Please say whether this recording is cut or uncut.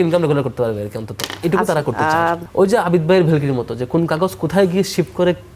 cut